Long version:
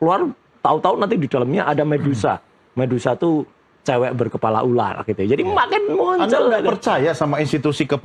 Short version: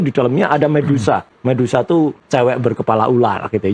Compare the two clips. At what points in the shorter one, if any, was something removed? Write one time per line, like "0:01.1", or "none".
0:01.3
0:02.2